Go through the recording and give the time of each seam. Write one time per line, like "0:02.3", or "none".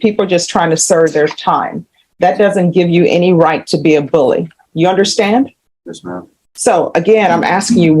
none

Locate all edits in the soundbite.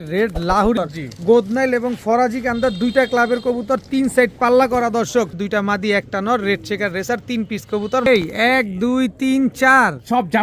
0:00.8
0:05.4
0:08.1

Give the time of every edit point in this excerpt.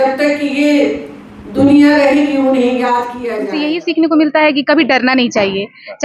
0:03.2

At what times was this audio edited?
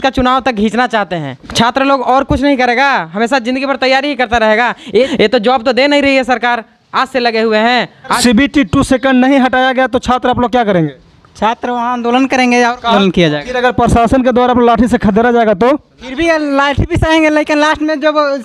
0:01.4
0:05.1
0:08.2
0:12.9

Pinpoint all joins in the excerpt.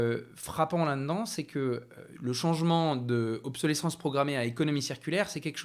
none

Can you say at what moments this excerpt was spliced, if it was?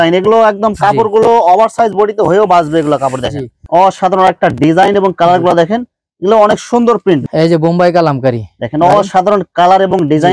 0:03.6
0:07.2

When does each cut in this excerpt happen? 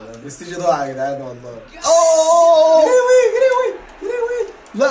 none

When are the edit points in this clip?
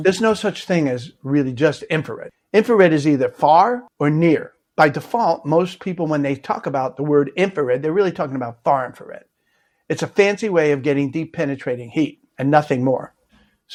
none

